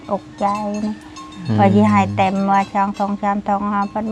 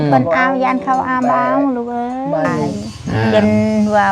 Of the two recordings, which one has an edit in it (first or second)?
second